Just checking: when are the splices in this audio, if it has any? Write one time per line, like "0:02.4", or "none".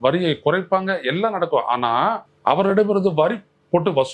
0:02.3